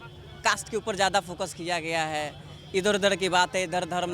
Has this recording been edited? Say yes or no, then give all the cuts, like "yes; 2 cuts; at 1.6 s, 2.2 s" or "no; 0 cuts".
no; 0 cuts